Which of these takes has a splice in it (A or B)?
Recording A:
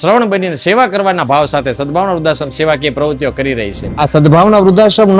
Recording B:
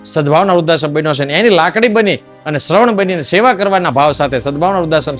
A